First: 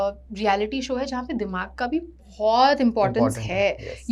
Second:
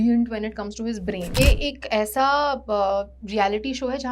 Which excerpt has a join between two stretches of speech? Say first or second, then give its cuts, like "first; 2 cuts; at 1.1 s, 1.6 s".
second; 1 cut; at 1.4 s